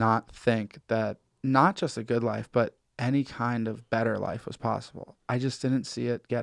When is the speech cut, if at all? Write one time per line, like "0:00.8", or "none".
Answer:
0:01.3